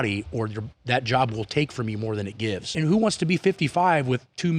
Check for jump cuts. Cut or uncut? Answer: cut